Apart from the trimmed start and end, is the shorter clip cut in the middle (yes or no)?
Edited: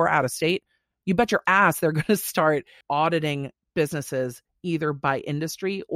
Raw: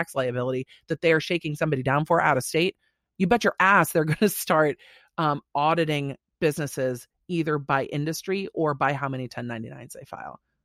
yes